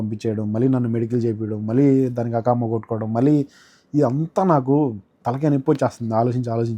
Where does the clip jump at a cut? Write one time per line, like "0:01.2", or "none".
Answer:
none